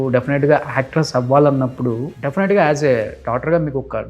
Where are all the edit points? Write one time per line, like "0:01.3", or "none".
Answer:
0:02.1